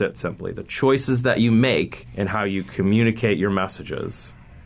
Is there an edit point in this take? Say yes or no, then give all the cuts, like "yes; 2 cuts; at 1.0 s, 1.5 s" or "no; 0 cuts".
yes; 1 cut; at 2.0 s